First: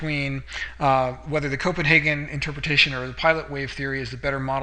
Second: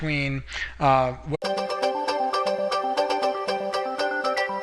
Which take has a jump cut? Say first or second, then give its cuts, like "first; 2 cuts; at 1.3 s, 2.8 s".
first; 1 cut; at 1.4 s